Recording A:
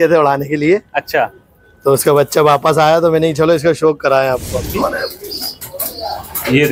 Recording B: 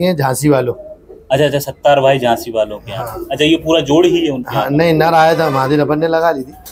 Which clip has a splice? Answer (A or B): A